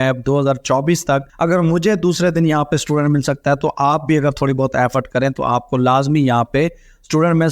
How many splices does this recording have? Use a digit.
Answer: 1